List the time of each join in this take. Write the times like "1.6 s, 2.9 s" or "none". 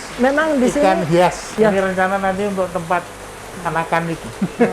1.4 s